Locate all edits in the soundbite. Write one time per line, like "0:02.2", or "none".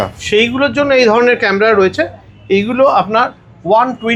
none